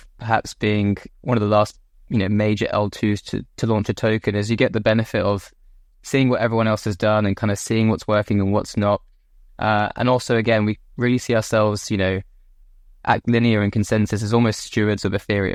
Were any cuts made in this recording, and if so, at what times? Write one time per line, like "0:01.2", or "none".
none